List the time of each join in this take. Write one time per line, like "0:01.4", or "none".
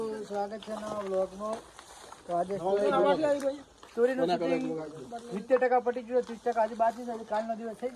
none